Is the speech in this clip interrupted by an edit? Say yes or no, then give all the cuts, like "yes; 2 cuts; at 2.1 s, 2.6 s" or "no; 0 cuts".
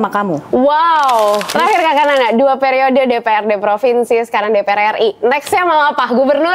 yes; 1 cut; at 1.5 s